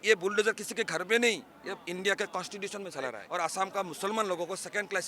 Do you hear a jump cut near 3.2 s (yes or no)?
yes